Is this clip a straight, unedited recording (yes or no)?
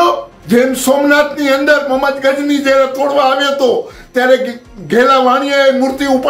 yes